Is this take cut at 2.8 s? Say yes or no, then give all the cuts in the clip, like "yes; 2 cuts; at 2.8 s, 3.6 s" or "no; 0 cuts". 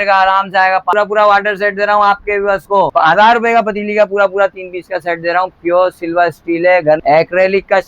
yes; 3 cuts; at 0.9 s, 2.8 s, 7.0 s